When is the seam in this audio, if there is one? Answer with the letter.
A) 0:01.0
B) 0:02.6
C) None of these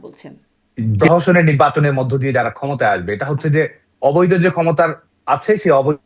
A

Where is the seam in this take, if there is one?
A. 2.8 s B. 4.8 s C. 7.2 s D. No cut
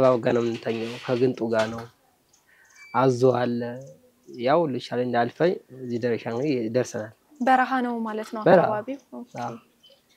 D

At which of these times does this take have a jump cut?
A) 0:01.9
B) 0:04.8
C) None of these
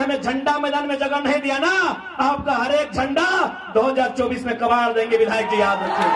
C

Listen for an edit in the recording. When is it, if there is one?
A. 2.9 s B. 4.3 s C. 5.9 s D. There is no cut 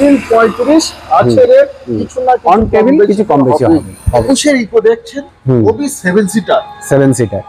B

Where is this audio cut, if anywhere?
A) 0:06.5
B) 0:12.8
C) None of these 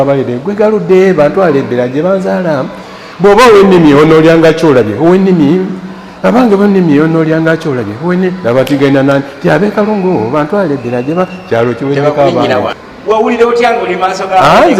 B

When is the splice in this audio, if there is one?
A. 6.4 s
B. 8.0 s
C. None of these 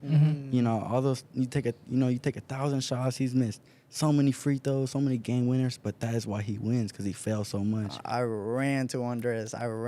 B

